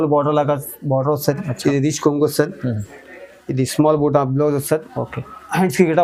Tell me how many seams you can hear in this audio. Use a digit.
0